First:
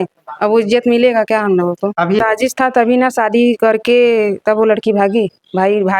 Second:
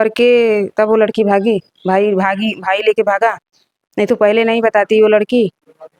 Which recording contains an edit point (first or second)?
first